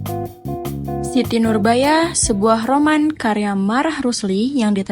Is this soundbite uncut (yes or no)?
no